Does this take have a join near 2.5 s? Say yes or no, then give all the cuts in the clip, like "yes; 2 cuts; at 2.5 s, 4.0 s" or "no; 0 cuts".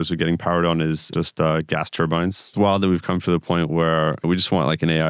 yes; 3 cuts; at 1.1 s, 2.5 s, 4.2 s